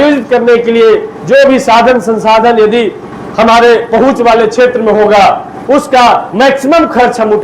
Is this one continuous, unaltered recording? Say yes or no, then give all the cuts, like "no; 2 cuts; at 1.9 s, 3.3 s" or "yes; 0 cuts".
yes; 0 cuts